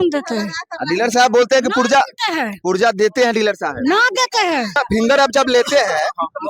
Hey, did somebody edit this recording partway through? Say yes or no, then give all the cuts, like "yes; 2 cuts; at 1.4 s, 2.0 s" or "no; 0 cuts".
yes; 1 cut; at 4.8 s